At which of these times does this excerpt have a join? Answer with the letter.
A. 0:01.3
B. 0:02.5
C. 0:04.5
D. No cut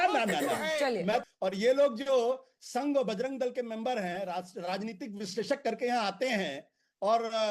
A